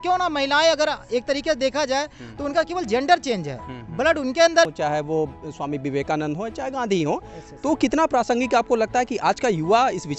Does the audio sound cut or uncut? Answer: cut